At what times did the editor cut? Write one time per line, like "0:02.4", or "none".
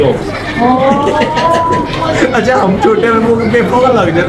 none